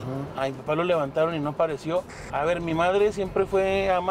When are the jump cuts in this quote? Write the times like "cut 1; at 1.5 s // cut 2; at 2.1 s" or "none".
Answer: cut 1; at 2.2 s